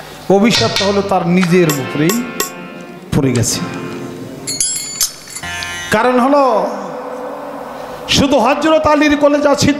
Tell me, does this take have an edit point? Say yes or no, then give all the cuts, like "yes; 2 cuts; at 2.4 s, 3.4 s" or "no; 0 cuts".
no; 0 cuts